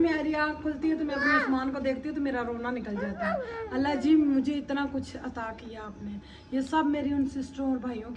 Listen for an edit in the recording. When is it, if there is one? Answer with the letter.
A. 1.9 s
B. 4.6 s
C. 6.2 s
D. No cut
D